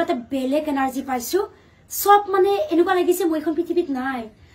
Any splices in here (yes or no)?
no